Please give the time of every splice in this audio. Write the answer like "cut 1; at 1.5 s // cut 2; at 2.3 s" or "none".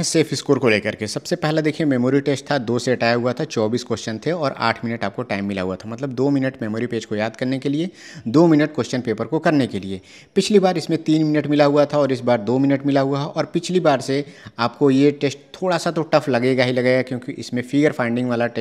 none